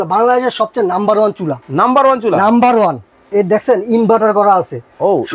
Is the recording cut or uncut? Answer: cut